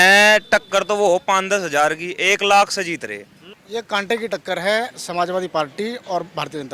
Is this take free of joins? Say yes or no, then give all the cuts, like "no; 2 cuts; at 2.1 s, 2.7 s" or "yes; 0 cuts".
no; 1 cut; at 3.6 s